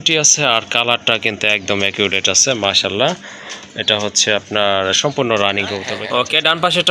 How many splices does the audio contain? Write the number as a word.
one